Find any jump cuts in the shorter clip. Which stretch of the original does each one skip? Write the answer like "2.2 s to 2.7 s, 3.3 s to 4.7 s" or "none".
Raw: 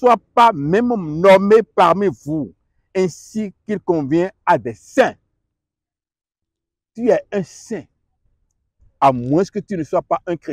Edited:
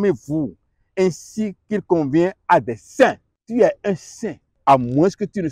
5.3 s to 6.8 s, 7.9 s to 8.8 s